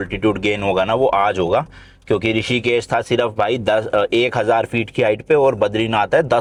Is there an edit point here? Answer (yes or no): no